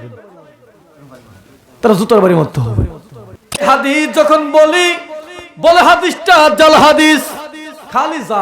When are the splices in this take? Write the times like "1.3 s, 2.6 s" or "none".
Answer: 3.6 s

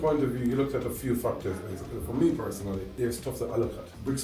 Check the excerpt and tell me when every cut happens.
none

